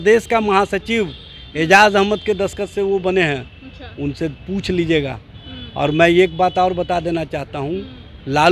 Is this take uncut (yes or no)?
yes